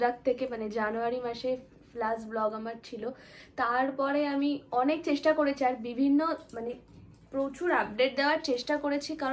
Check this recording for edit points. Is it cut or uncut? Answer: uncut